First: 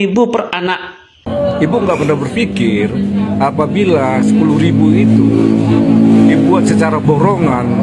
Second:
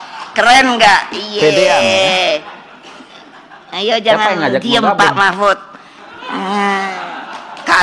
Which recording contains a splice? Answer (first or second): first